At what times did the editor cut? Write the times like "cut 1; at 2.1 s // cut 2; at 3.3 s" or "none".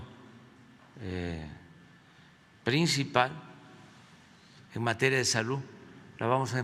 none